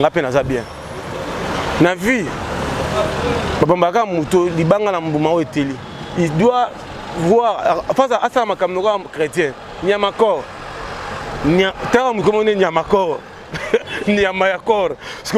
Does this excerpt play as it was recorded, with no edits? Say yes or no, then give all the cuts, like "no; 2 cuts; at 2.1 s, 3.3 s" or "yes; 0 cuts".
yes; 0 cuts